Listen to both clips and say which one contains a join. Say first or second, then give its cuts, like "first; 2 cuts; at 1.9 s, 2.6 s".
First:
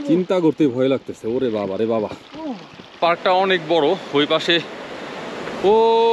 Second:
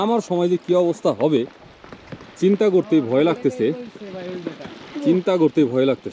first; 1 cut; at 2.9 s